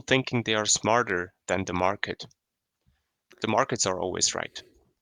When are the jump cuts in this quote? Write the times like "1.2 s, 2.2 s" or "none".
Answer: 3.3 s